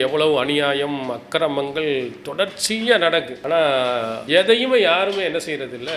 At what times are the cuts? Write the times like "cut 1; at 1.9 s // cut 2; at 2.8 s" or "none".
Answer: cut 1; at 3.3 s // cut 2; at 4.2 s